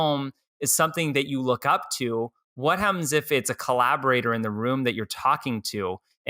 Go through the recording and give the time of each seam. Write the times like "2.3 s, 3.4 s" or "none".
none